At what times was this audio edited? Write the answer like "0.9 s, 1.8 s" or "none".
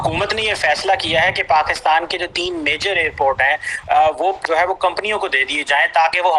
4.4 s